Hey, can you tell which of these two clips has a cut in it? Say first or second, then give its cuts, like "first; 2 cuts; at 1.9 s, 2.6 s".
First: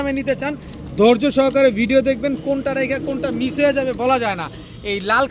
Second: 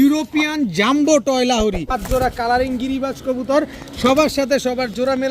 second; 1 cut; at 1.9 s